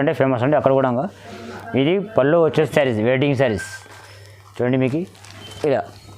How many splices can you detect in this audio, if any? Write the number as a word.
one